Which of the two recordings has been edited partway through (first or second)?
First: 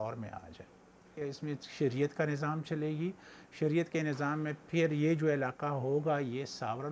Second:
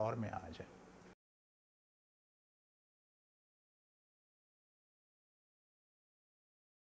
first